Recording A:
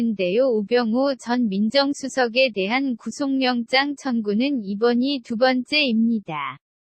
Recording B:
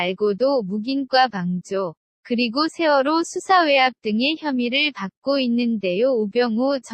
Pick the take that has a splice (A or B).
A